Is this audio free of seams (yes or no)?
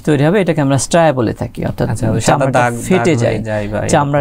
yes